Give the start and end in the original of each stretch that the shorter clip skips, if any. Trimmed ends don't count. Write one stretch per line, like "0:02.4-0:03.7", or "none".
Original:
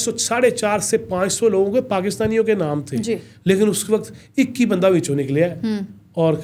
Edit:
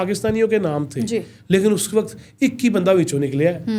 none